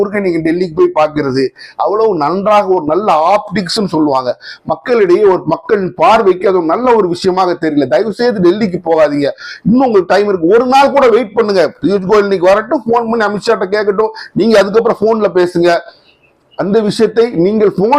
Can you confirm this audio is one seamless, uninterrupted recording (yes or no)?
yes